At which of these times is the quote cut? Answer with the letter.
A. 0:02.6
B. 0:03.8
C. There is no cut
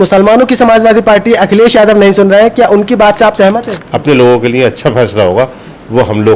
B